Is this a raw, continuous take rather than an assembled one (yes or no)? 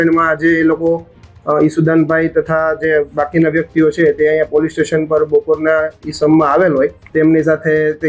no